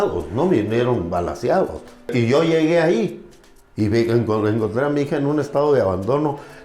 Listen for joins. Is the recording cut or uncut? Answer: cut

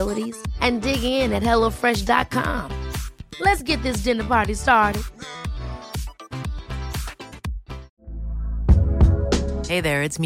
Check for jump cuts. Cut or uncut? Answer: cut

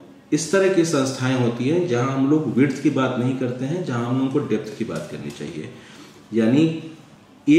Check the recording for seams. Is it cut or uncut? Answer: uncut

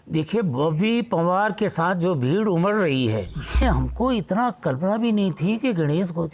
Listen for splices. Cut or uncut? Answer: cut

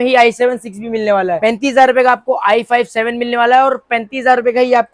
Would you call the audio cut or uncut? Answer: uncut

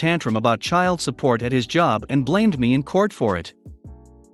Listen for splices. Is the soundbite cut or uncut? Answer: uncut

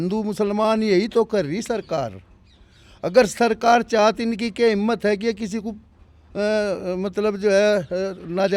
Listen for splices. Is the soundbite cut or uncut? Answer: uncut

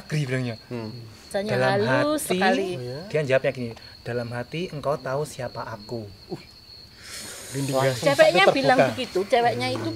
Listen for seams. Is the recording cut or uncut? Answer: cut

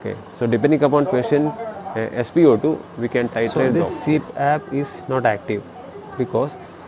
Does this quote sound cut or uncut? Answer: cut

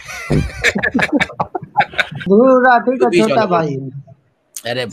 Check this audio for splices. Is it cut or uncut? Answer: cut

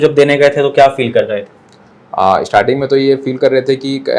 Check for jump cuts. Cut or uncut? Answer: uncut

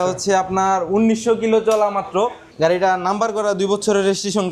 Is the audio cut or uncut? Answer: cut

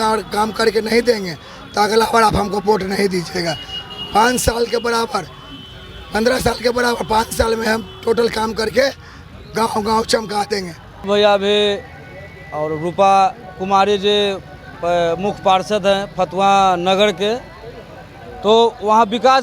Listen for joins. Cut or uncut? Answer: cut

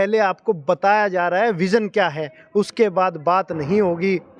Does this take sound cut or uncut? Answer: uncut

